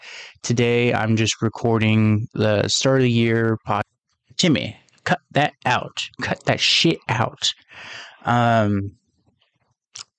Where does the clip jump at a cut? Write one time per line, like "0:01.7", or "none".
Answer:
0:03.9